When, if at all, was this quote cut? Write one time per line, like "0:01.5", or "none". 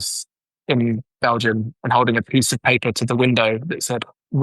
0:01.6